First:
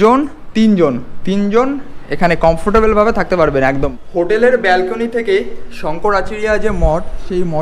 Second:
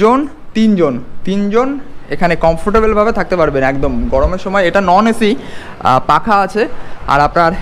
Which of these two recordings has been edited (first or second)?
first